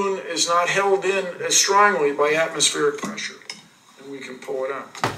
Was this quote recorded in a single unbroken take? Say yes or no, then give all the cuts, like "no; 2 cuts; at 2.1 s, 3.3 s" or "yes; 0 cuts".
yes; 0 cuts